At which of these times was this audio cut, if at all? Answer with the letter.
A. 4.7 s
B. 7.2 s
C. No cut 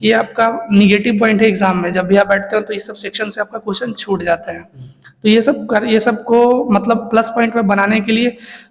C